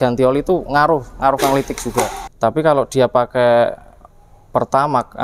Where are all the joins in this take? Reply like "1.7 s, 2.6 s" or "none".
2.2 s